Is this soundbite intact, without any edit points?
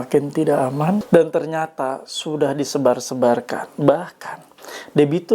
no; 1 cut; at 1.0 s

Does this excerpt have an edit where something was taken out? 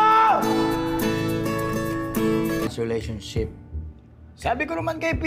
yes; 1 cut; at 2.7 s

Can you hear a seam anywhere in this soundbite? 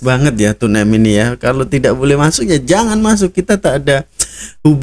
no; 0 cuts

